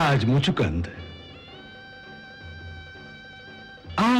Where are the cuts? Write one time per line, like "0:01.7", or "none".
none